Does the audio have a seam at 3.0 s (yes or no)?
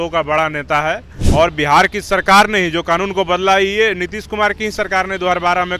no